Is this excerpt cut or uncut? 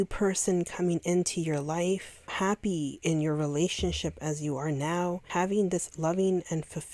cut